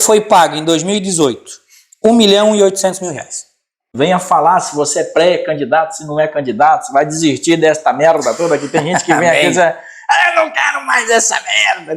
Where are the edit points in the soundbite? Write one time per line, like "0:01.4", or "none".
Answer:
0:03.9